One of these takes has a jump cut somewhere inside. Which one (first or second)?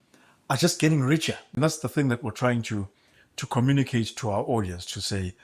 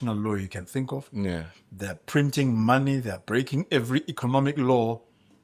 first